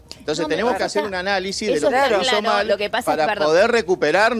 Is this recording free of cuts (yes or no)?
yes